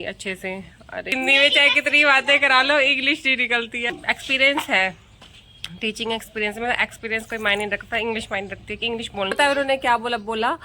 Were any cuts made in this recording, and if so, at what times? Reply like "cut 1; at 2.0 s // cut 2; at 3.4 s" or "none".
cut 1; at 1.1 s // cut 2; at 3.9 s // cut 3; at 9.3 s